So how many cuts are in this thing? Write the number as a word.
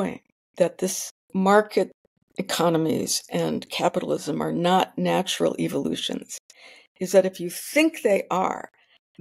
one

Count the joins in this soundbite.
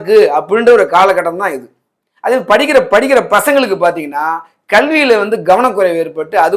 zero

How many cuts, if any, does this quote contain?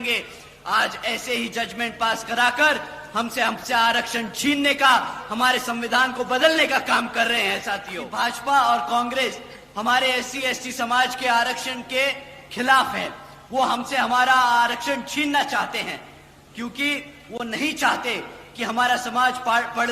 one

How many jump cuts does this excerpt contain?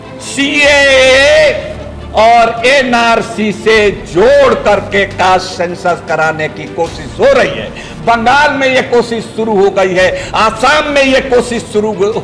zero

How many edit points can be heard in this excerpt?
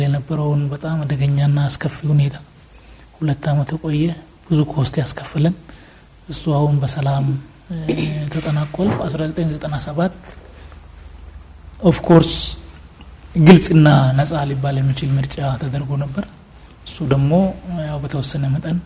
one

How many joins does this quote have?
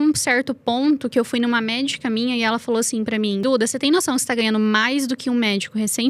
one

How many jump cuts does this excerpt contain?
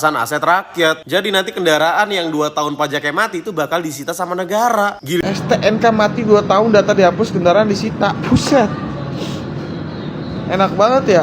one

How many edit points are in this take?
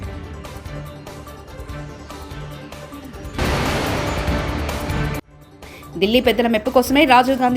one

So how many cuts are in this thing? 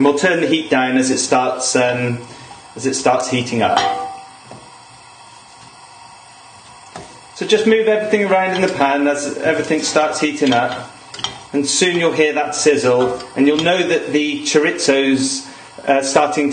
one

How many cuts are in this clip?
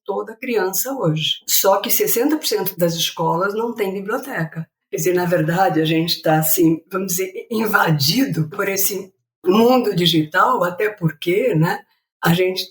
zero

